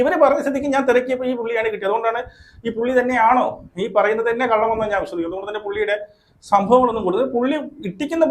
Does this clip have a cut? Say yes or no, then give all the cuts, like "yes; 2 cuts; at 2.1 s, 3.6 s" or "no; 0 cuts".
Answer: no; 0 cuts